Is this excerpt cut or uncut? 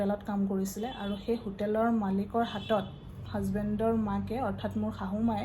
uncut